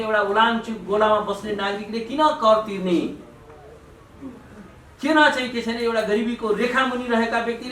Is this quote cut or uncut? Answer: uncut